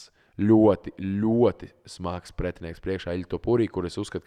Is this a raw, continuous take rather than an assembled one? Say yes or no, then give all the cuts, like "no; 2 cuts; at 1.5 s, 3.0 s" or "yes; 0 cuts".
yes; 0 cuts